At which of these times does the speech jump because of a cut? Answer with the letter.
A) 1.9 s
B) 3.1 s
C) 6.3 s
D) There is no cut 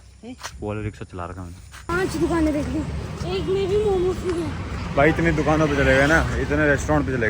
A